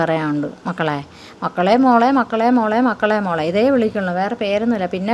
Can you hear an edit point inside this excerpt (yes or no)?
no